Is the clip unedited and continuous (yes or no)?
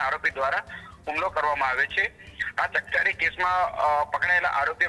yes